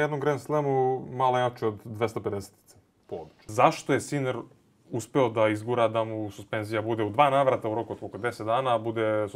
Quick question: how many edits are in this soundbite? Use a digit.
1